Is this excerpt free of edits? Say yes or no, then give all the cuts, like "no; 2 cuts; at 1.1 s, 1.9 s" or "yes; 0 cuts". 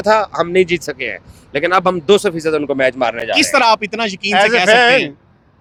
yes; 0 cuts